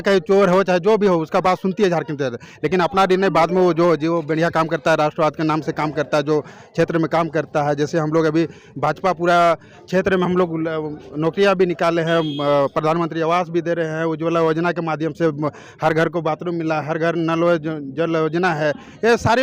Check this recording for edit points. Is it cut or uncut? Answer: uncut